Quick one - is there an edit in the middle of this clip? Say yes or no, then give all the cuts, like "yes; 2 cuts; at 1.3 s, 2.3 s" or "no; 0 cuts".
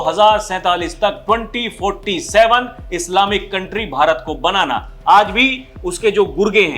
no; 0 cuts